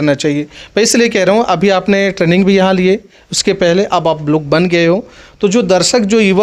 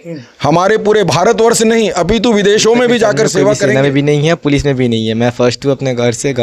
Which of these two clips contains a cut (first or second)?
second